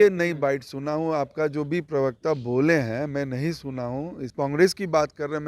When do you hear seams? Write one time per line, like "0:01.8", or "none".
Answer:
0:04.3